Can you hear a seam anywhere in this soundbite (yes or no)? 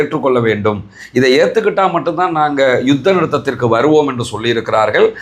no